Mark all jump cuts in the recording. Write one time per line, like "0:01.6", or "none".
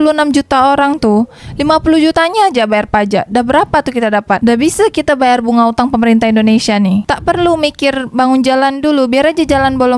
none